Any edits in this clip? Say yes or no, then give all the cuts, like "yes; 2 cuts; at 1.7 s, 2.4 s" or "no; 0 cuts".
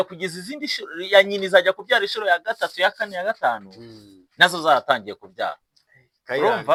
no; 0 cuts